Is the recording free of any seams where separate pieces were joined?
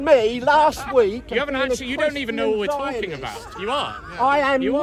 yes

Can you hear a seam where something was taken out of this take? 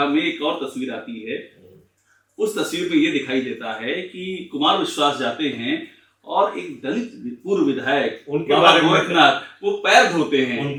no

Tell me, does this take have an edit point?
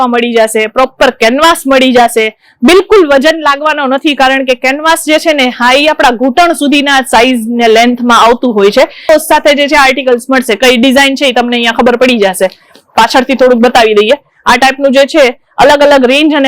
yes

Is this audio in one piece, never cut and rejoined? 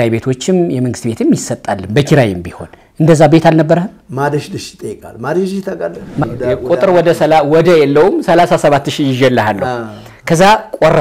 no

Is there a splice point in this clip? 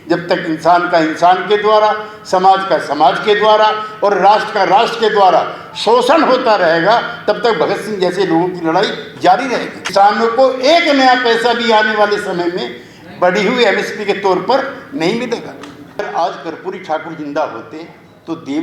yes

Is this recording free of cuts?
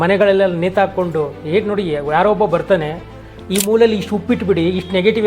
yes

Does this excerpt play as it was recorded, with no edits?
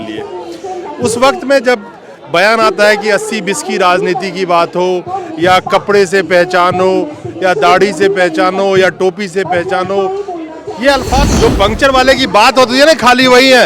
no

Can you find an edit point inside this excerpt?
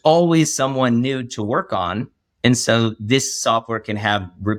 no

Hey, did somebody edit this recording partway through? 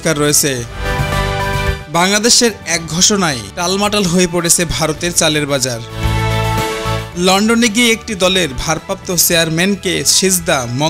no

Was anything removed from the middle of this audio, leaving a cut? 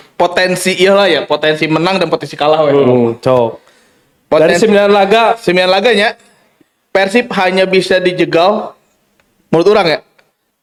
no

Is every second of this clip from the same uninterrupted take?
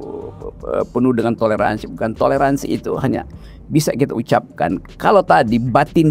yes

